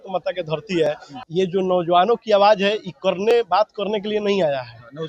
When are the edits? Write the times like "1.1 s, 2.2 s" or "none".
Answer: 1.2 s